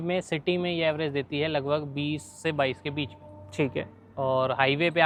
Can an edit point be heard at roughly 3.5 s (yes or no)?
no